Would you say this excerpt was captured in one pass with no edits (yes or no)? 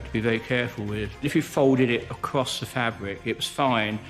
no